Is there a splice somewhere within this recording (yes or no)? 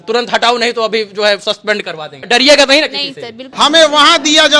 yes